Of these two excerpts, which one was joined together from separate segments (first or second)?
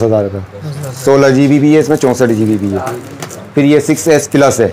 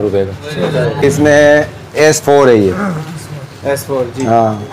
second